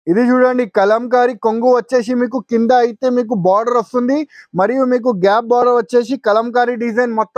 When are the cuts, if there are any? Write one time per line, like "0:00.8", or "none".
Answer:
none